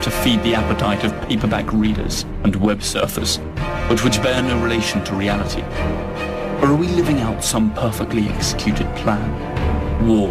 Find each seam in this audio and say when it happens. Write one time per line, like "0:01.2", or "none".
0:04.1